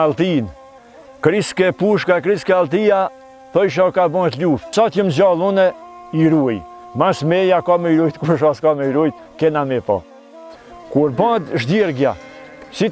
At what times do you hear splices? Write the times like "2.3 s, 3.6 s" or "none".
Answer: 4.7 s, 10.2 s